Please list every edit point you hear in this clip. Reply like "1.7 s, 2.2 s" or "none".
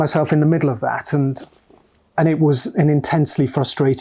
none